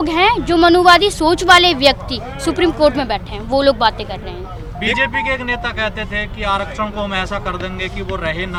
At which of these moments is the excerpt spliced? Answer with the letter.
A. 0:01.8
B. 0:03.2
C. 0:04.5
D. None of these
D